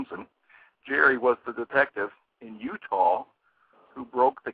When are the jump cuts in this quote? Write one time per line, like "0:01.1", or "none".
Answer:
none